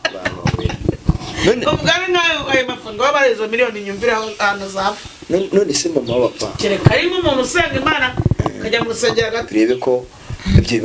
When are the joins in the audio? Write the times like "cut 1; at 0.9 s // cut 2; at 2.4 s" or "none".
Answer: cut 1; at 9.5 s